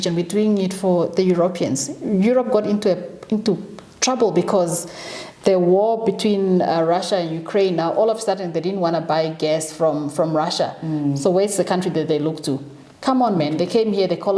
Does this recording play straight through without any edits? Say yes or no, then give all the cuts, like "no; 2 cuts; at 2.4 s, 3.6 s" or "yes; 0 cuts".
yes; 0 cuts